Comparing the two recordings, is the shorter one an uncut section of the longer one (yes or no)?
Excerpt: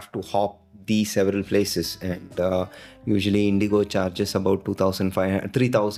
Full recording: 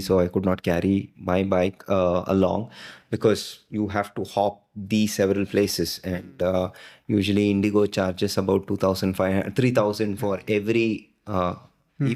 yes